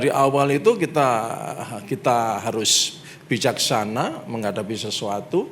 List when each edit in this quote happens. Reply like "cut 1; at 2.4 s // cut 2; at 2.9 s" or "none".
none